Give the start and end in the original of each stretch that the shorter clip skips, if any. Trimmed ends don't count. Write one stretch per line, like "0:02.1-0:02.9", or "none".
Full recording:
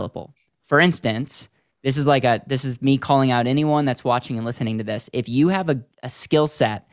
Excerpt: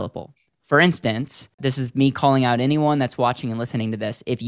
0:01.6-0:02.4